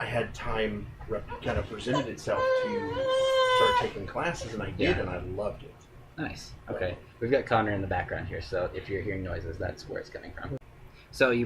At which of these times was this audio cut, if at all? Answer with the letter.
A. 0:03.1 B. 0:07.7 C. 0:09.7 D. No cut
A